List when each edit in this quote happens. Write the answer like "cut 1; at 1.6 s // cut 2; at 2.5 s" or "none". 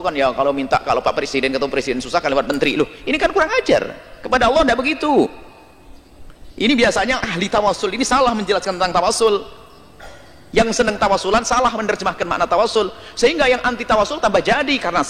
none